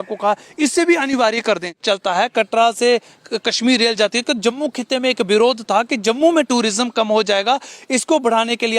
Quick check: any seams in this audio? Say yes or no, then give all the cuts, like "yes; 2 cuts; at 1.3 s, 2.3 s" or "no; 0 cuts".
yes; 1 cut; at 1.7 s